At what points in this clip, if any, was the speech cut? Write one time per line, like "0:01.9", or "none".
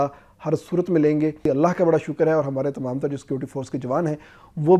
0:01.4